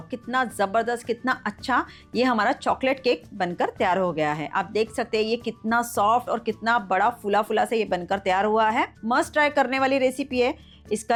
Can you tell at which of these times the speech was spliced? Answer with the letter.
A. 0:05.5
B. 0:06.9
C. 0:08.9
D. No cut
D